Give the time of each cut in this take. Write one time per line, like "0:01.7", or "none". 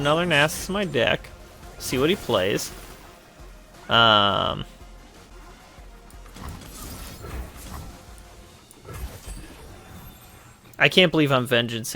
0:05.3